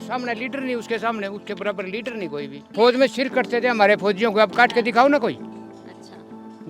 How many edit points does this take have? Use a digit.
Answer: 0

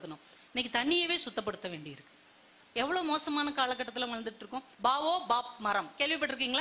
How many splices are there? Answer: 1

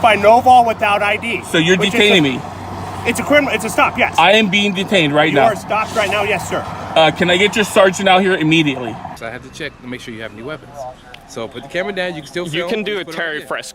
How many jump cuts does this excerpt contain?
1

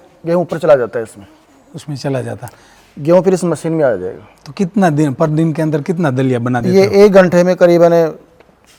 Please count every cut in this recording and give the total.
0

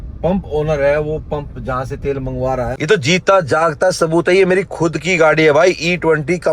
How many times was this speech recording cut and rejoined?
1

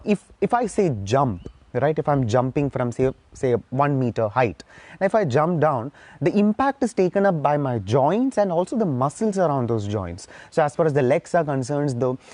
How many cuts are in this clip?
0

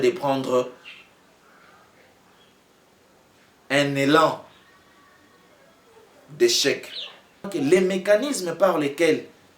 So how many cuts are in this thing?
1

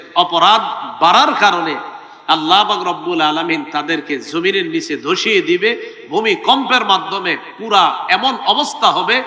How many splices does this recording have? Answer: 0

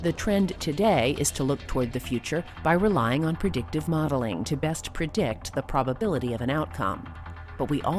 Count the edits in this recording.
1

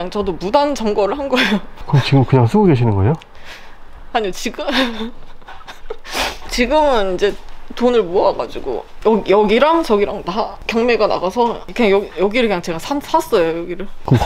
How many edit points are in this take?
0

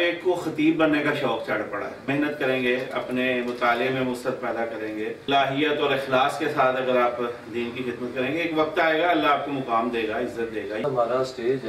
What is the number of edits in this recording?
3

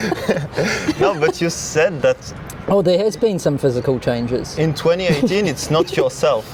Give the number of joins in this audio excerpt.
0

